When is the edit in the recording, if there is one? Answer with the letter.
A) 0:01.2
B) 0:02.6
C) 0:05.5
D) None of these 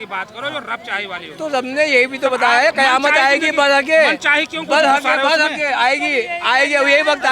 D